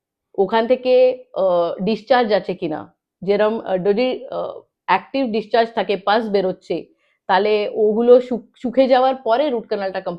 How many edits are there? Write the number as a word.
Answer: zero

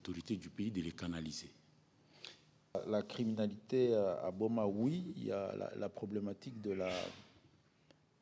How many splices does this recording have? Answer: one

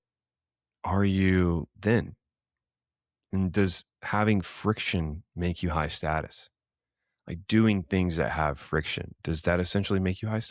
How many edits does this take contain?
zero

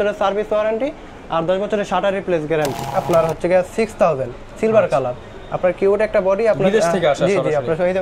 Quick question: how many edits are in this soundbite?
one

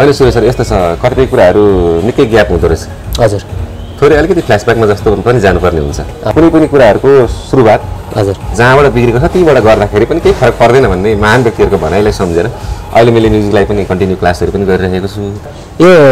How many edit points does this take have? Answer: two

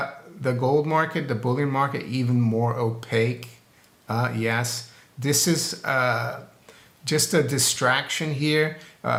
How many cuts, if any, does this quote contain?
zero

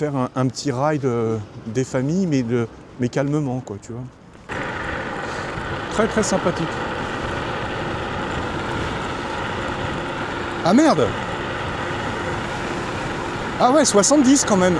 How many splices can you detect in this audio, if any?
one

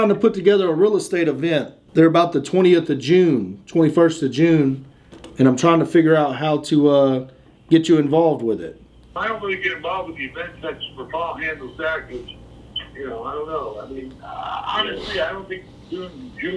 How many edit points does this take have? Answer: one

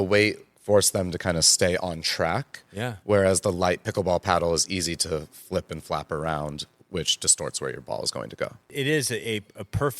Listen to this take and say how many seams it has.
one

